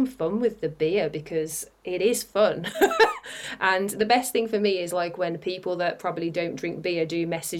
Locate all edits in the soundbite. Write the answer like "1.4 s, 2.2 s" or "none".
none

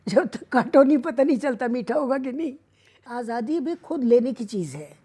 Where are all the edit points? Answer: 3.1 s

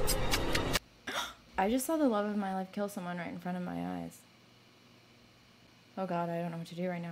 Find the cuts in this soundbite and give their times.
1.0 s, 5.7 s

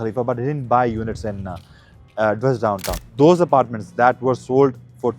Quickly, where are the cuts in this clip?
3.0 s

